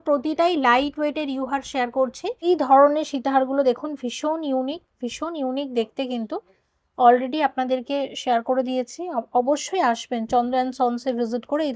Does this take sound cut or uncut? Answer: cut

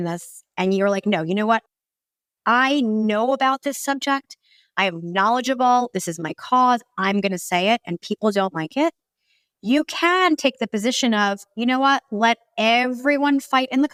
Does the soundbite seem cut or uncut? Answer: uncut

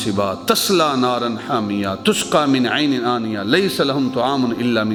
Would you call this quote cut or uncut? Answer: uncut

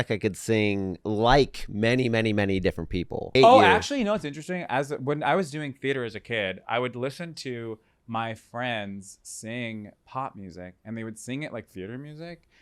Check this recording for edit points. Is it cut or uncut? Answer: cut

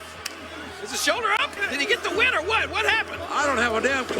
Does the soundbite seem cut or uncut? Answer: cut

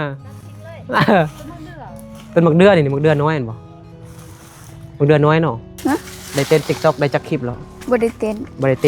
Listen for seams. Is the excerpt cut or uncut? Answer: cut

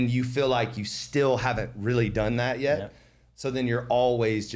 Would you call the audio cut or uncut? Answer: uncut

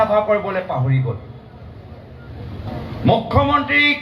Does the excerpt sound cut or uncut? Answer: cut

